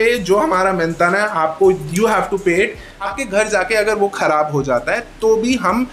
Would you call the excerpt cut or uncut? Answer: cut